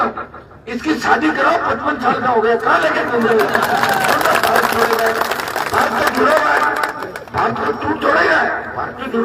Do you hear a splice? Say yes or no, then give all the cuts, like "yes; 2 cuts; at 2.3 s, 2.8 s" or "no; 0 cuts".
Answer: no; 0 cuts